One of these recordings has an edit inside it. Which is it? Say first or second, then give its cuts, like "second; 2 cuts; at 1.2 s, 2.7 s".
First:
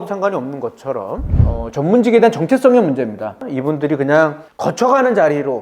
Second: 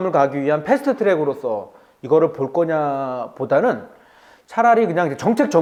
first; 1 cut; at 1.4 s